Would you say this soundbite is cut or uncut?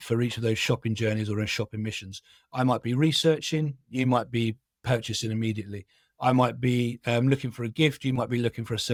uncut